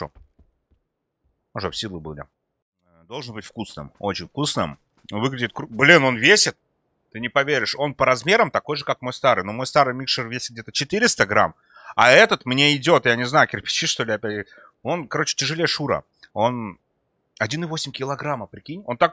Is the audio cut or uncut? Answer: cut